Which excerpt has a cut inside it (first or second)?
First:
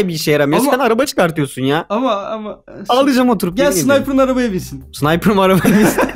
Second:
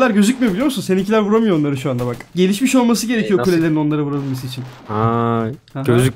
first